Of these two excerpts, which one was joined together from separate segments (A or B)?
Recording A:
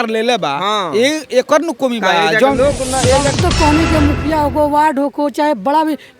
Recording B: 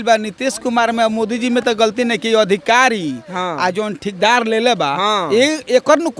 A